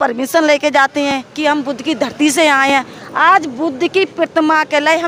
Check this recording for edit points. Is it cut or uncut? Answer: uncut